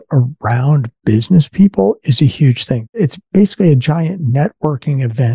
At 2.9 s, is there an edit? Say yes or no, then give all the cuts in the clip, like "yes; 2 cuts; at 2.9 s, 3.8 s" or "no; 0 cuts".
yes; 1 cut; at 2.9 s